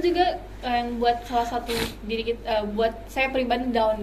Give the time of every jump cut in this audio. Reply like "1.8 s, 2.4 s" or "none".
none